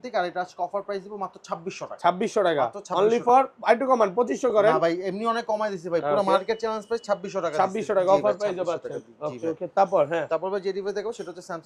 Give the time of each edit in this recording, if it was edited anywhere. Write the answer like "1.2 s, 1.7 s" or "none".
none